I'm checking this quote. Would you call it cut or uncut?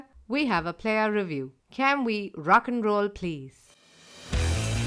uncut